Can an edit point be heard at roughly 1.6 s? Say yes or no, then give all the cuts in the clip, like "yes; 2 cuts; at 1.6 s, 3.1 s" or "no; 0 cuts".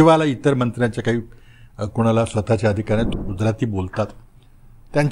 no; 1 cut; at 3.1 s